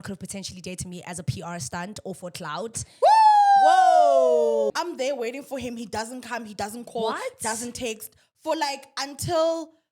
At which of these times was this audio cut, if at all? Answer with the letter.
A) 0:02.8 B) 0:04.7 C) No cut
B